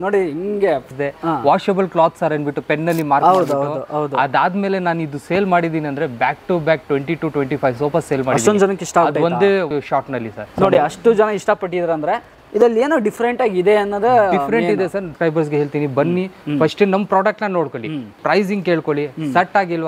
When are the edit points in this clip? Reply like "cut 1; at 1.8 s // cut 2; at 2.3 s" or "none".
cut 1; at 0.9 s // cut 2; at 9.9 s // cut 3; at 15.1 s // cut 4; at 18.2 s